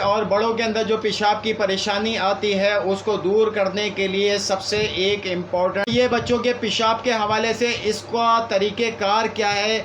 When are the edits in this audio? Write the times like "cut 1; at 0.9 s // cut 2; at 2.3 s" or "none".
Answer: cut 1; at 5.9 s